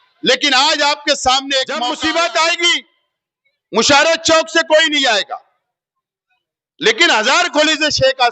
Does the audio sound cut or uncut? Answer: cut